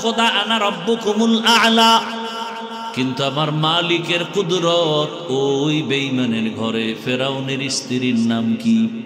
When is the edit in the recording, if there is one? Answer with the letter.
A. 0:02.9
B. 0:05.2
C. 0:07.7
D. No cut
A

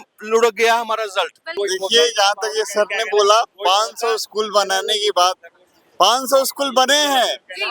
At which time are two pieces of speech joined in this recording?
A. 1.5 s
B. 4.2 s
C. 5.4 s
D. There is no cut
A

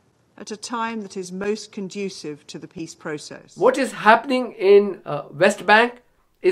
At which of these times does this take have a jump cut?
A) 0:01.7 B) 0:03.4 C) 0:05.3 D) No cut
B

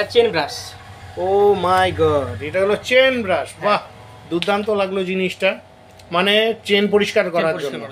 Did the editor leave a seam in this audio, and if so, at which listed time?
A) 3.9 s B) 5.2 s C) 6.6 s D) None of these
D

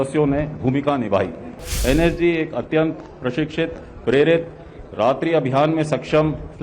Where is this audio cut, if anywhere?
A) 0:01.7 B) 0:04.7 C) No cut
A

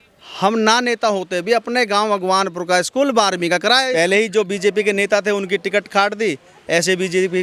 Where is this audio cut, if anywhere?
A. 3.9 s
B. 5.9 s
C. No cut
A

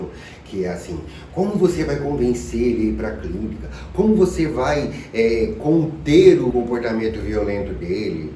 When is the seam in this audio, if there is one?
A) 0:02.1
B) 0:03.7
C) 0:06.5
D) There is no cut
C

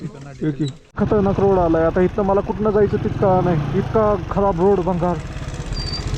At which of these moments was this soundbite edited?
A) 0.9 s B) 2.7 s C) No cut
A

